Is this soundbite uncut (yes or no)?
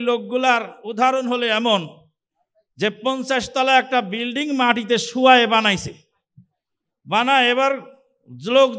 yes